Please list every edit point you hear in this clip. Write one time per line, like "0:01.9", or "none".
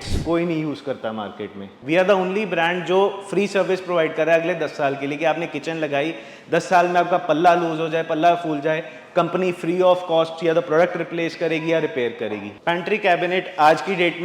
0:01.7
0:12.5